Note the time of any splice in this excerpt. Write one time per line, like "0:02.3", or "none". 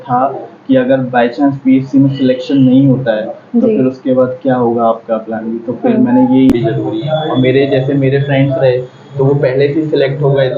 0:06.5

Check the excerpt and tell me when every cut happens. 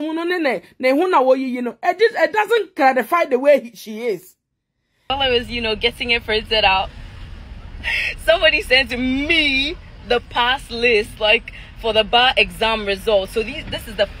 0:05.1

